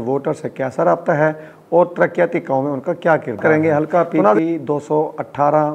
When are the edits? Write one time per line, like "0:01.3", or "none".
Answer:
0:03.4